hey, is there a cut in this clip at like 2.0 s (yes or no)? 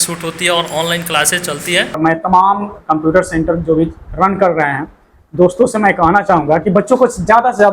yes